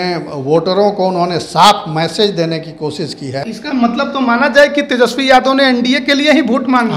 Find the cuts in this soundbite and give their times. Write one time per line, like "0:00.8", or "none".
0:03.4